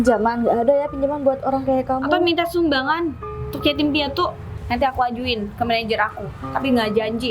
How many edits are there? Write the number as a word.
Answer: one